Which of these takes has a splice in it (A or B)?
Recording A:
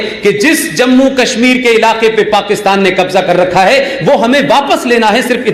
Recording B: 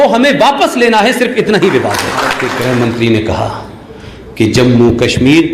B